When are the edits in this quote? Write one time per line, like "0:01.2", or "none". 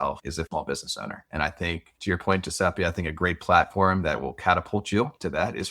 none